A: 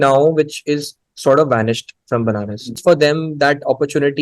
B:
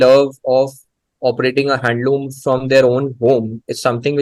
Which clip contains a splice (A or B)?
A